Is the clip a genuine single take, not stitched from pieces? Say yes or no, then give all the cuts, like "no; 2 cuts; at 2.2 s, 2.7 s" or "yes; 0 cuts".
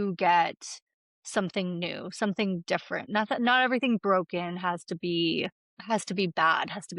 no; 2 cuts; at 3.1 s, 5.7 s